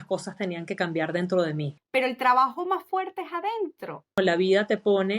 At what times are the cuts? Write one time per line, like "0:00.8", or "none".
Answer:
0:01.8
0:04.2